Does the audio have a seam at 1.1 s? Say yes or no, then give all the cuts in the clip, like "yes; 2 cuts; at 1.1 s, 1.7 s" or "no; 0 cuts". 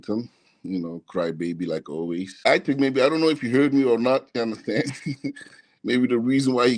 no; 1 cut; at 2.4 s